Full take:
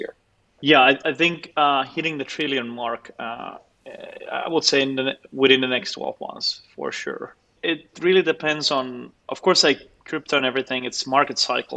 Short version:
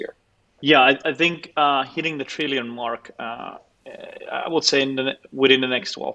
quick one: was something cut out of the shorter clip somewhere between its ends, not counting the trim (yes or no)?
no